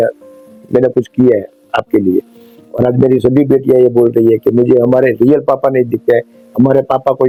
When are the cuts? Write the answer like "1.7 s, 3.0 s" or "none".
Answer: none